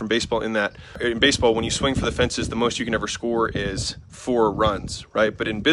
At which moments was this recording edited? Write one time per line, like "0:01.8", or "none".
0:01.0